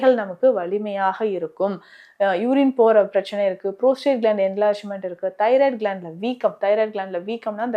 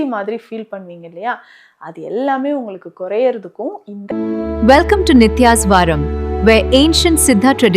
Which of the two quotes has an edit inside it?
second; 1 cut; at 4.0 s

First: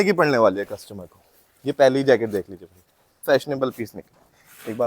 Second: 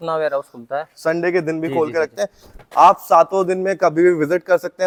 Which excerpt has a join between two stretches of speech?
first; 1 cut; at 3.1 s

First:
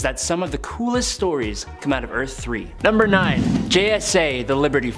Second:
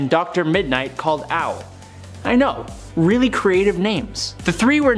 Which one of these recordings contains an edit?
first; 1 cut; at 2.7 s

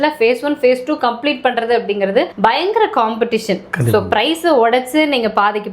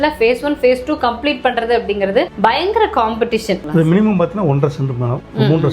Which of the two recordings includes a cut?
second; 1 cut; at 3.6 s

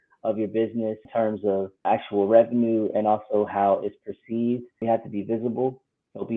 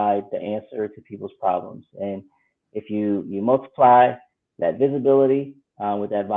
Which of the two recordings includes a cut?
first; 3 cuts; at 1.0 s, 1.8 s, 4.8 s

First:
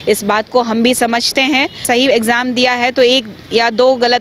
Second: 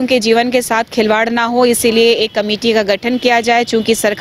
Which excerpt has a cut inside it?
first; 1 cut; at 1.8 s

